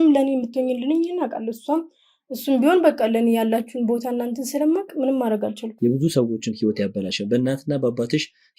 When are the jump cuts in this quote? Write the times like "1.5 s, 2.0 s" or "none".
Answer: 5.6 s